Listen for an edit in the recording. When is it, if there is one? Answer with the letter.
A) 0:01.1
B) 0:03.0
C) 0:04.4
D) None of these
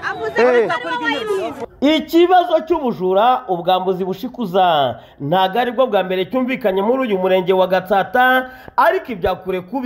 A